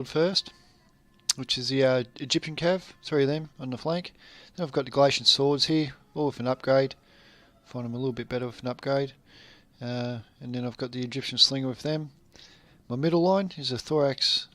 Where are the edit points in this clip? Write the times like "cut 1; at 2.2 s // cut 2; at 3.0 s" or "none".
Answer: cut 1; at 7.7 s

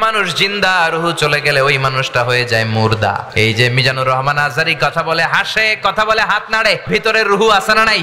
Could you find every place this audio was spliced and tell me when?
cut 1; at 3.3 s // cut 2; at 6.8 s

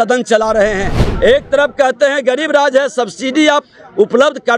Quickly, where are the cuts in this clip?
cut 1; at 1.0 s

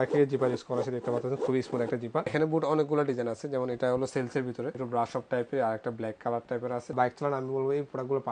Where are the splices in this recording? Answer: cut 1; at 2.3 s // cut 2; at 4.8 s // cut 3; at 6.9 s

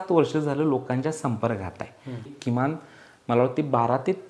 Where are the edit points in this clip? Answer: cut 1; at 2.3 s

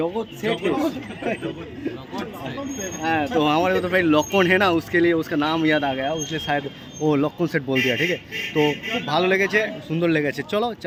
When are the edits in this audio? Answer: none

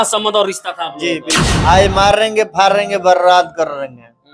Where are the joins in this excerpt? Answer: cut 1; at 1.5 s

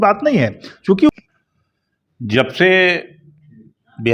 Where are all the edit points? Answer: cut 1; at 1.1 s

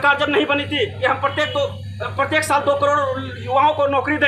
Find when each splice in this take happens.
none

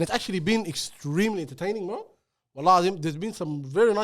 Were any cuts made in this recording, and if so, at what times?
none

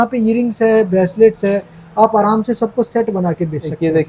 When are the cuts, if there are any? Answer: none

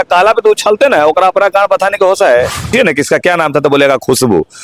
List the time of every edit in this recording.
cut 1; at 2.7 s

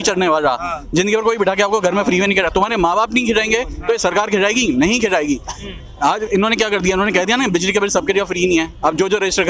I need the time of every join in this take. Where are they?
none

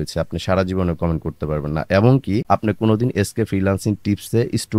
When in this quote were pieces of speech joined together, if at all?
none

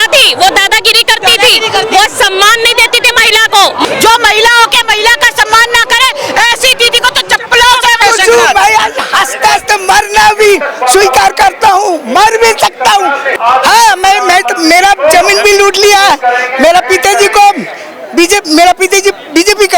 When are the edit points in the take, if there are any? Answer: cut 1; at 3.9 s // cut 2; at 8.0 s // cut 3; at 13.3 s

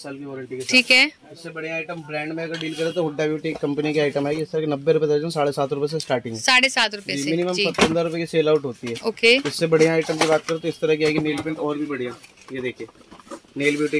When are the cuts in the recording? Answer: none

